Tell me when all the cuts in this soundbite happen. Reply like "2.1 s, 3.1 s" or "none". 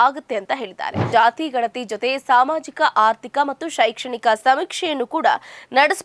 1.0 s